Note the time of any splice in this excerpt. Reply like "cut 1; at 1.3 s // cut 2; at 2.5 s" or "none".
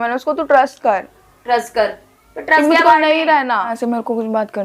cut 1; at 3.7 s